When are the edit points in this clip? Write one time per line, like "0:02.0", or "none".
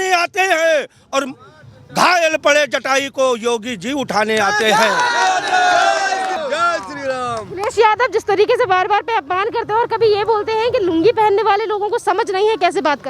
0:06.4